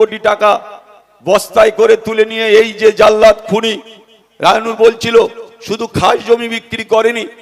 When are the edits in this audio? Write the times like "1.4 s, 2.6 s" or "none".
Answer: none